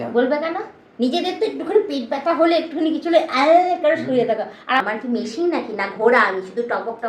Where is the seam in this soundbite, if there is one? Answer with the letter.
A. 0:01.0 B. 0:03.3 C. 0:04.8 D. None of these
C